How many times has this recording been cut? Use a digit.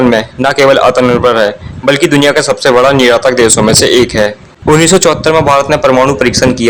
0